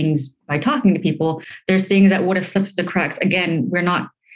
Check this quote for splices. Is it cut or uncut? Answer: cut